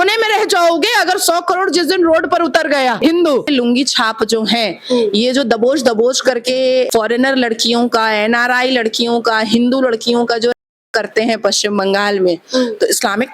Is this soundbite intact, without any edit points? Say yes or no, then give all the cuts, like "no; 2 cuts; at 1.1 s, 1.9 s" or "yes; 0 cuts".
no; 1 cut; at 3.0 s